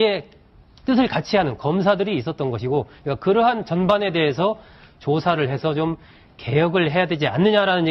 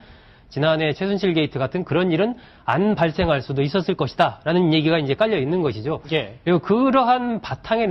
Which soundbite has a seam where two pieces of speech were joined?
second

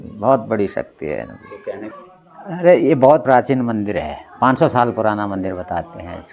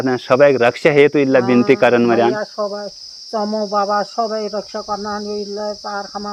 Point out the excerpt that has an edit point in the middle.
first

